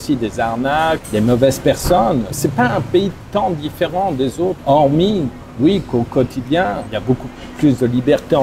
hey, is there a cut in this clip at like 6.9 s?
yes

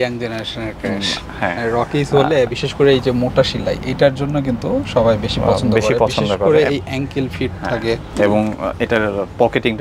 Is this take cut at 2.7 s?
no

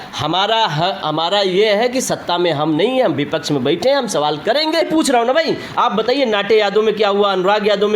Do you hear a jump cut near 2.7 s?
no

